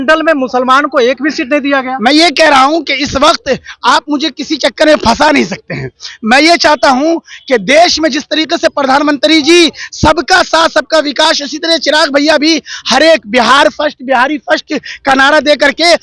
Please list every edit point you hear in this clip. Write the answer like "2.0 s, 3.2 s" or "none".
none